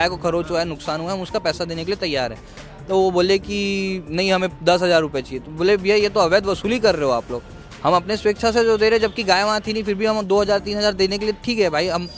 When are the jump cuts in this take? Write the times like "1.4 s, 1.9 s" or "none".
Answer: none